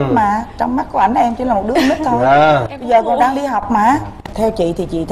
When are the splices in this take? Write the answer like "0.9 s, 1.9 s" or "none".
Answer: 4.2 s